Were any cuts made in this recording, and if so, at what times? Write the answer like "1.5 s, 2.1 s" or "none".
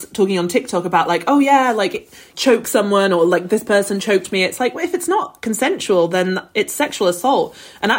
2.3 s